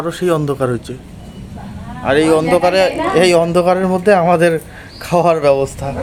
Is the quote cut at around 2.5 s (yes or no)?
no